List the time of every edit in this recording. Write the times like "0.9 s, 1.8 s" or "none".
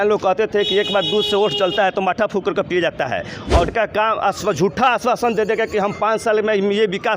3.7 s